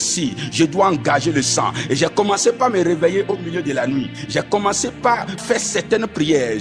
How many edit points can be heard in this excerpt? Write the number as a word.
two